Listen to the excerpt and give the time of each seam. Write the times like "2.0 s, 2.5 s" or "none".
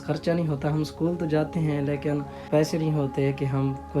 2.4 s